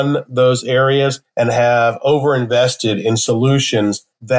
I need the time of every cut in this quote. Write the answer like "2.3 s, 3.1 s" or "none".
none